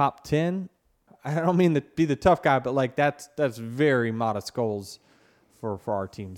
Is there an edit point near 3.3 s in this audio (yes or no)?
no